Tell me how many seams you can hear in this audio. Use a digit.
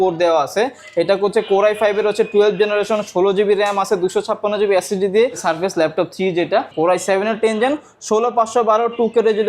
2